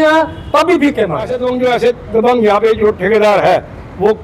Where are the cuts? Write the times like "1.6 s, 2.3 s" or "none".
1.3 s